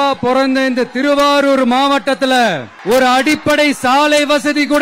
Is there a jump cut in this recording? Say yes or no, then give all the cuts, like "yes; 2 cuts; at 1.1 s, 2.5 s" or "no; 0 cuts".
yes; 1 cut; at 2.7 s